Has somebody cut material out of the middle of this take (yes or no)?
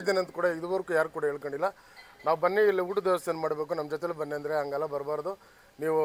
no